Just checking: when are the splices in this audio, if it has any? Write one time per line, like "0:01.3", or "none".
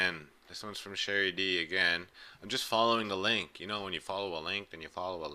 0:02.1

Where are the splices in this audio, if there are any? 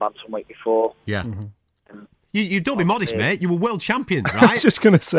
none

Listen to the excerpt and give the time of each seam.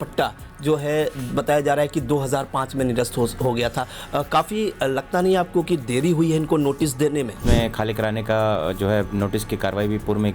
0:07.4

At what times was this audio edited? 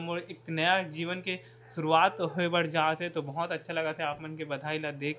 none

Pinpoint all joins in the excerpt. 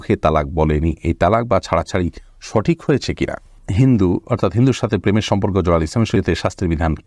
0:03.6
0:06.1

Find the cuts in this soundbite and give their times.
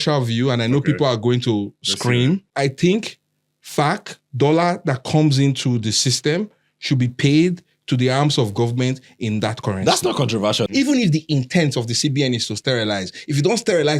0:02.5
0:10.7

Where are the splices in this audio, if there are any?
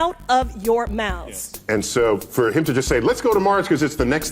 0:01.6

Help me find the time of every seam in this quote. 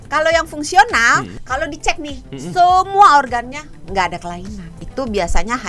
0:01.4
0:04.8

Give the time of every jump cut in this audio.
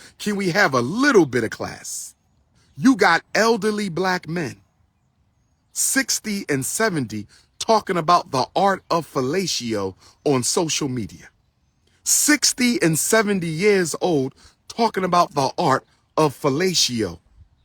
0:02.6

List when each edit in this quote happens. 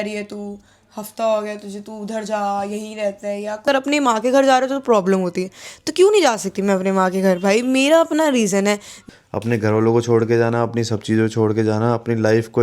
0:03.6
0:09.0

